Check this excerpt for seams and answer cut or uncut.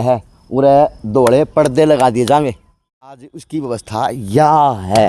cut